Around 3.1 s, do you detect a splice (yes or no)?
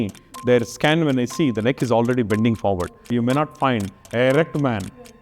yes